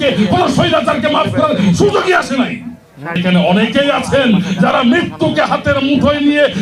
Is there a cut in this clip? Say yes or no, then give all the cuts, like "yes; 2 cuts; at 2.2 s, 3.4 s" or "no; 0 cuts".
yes; 1 cut; at 3.2 s